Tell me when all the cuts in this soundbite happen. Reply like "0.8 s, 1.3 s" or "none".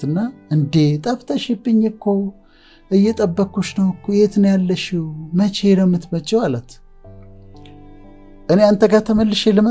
none